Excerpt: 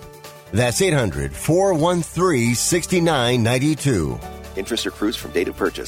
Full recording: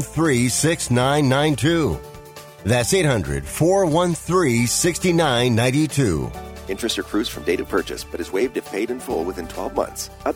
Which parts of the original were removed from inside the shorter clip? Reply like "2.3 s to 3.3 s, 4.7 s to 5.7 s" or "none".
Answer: none